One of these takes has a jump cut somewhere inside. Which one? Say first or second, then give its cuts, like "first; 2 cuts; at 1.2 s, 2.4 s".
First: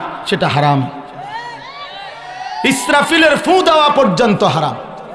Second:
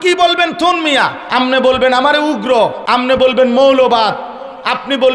second; 2 cuts; at 1.2 s, 2.8 s